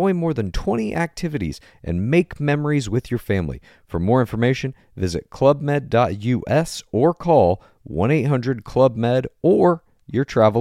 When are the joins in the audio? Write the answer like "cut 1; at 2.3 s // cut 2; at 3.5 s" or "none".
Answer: none